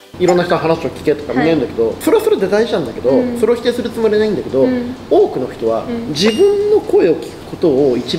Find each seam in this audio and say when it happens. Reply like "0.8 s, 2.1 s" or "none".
none